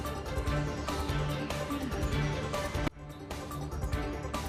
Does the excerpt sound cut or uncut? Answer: uncut